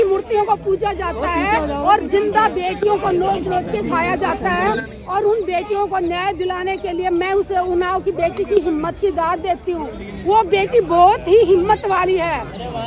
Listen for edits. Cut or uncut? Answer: uncut